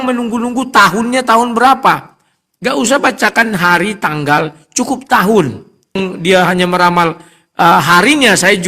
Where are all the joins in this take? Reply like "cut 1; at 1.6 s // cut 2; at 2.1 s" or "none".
cut 1; at 6.0 s